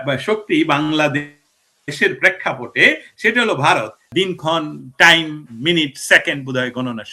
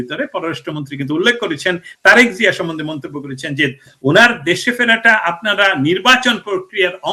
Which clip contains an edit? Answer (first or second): first